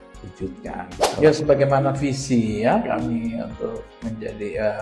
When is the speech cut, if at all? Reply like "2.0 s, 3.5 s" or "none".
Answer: 1.2 s